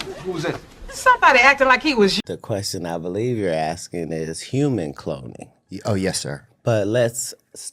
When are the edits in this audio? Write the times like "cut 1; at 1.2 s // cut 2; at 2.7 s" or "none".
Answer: cut 1; at 2.2 s